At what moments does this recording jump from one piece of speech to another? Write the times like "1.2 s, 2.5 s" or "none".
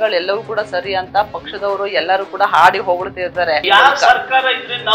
3.6 s